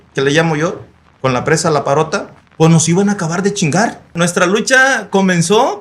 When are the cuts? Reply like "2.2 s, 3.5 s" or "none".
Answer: 4.1 s